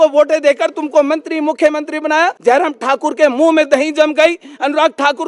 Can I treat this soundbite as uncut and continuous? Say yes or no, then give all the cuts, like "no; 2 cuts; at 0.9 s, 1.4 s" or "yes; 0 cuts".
no; 1 cut; at 2.4 s